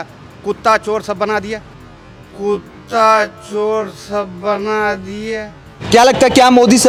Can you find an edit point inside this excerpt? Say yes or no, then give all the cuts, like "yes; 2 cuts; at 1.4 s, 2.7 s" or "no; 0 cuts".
no; 0 cuts